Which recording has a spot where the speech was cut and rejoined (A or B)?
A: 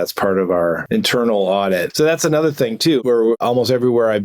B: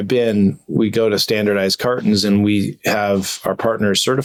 A